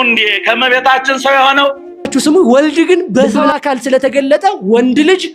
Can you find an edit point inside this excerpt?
yes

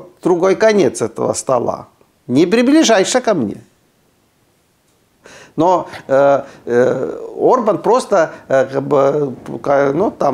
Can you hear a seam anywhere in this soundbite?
no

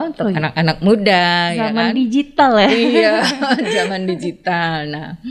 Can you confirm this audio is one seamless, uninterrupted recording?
yes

